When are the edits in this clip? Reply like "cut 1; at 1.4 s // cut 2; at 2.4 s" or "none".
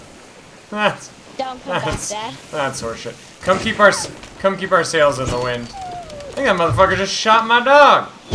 none